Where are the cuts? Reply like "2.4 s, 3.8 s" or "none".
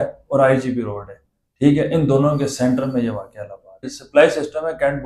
3.9 s